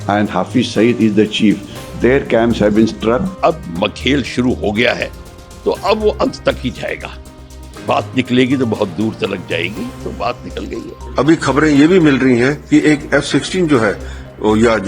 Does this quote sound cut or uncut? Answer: cut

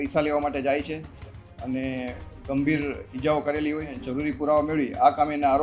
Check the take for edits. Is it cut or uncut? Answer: cut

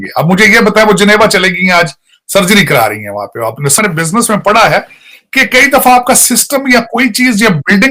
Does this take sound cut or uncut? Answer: uncut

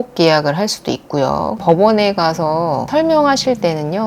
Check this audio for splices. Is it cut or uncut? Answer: cut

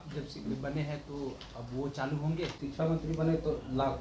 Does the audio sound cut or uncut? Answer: cut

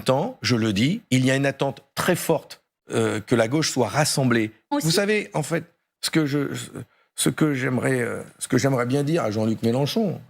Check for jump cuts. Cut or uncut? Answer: cut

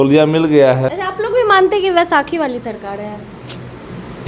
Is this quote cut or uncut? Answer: cut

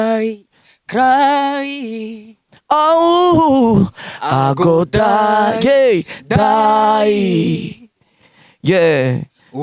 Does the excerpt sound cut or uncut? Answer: uncut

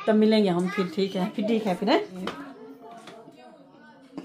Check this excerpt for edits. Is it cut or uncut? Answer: cut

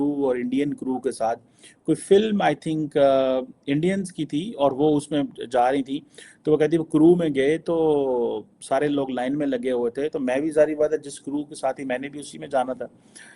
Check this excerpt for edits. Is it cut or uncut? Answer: uncut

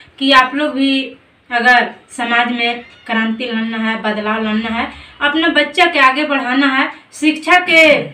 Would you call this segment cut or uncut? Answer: uncut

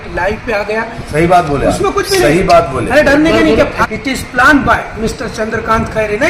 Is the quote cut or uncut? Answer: cut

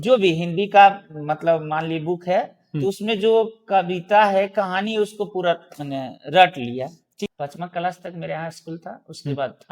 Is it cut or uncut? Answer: cut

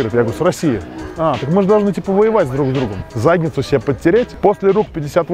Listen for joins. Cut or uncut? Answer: cut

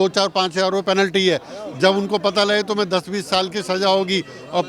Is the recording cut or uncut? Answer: uncut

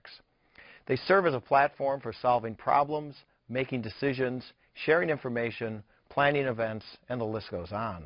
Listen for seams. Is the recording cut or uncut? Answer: cut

